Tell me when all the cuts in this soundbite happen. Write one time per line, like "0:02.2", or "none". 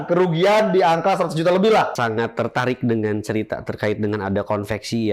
0:01.9